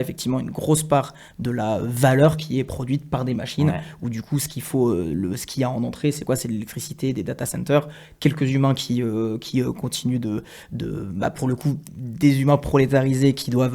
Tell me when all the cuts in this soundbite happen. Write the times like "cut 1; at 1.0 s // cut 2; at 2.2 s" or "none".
none